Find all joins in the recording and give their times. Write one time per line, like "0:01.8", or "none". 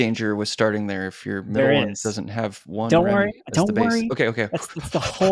none